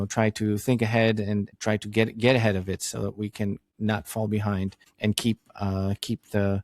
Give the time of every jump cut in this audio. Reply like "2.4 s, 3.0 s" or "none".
1.5 s, 3.7 s, 4.8 s